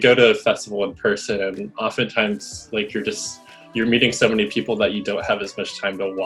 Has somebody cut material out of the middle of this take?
no; 0 cuts

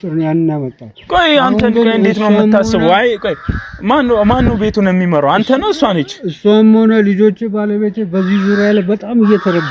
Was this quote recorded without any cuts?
yes; 0 cuts

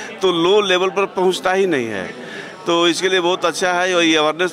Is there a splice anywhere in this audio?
no; 0 cuts

